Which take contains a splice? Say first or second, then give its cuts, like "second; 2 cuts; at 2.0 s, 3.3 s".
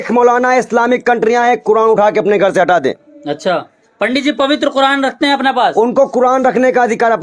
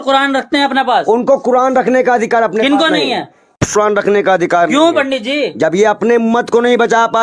second; 1 cut; at 3.6 s